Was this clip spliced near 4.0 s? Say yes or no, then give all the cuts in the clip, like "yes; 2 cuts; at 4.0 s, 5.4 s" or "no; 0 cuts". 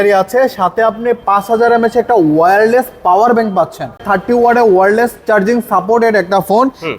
yes; 1 cut; at 4.0 s